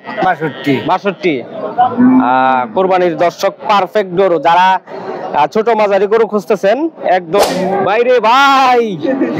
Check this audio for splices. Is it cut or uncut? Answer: cut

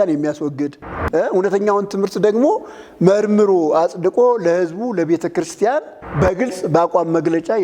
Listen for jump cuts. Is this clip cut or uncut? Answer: cut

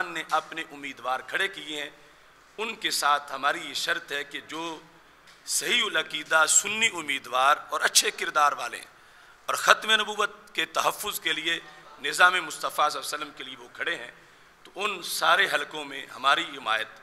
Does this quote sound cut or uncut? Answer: uncut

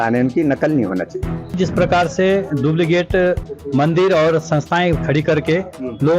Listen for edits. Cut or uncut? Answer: cut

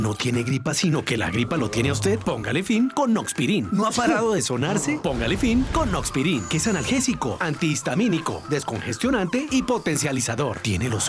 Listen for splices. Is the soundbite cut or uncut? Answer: uncut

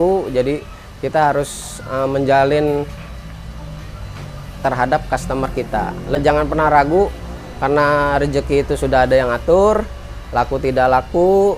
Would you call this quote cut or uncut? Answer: cut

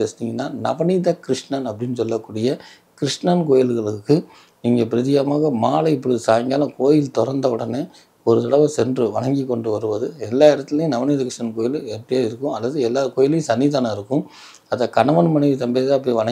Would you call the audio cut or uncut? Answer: uncut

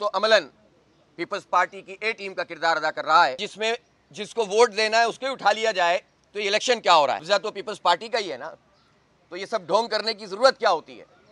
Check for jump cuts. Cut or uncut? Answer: cut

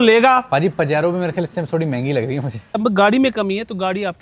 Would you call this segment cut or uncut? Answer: cut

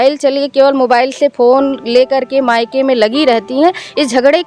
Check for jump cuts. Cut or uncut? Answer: uncut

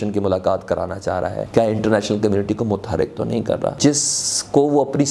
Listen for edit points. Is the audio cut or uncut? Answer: cut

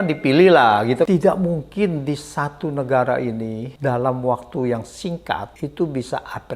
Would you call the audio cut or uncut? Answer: cut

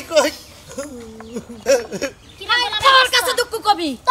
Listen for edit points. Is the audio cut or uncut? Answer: uncut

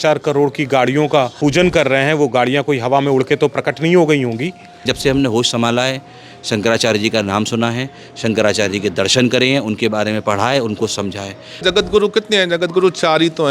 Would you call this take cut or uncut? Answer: cut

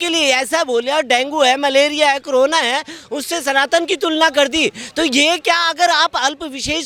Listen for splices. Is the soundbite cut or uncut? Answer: uncut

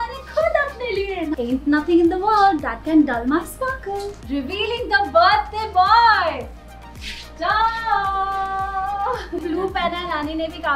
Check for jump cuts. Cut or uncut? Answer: cut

